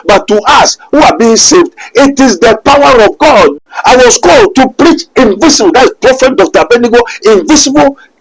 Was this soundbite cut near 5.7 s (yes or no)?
no